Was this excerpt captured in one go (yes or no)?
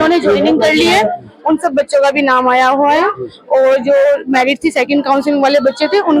yes